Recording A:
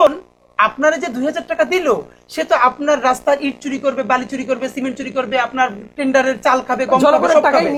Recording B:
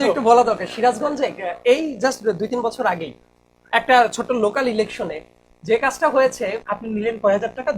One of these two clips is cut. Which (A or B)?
B